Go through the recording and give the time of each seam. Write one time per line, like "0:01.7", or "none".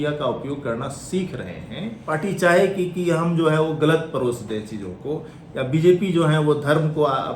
0:01.9